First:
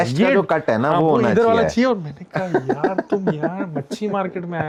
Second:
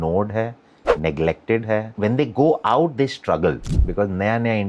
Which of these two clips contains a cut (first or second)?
second